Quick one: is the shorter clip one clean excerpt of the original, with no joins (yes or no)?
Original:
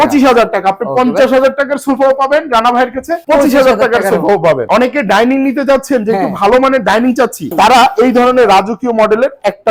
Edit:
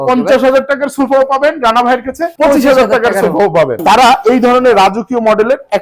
no